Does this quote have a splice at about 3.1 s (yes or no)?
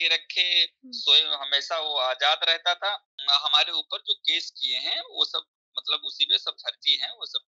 yes